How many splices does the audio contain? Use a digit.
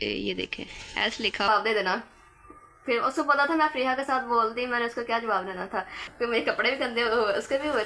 2